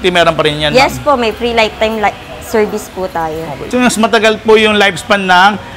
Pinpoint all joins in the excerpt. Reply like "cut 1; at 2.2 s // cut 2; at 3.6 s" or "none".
cut 1; at 3.6 s